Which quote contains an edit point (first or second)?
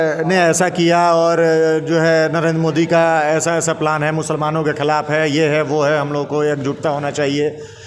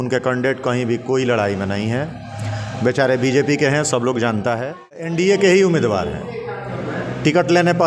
second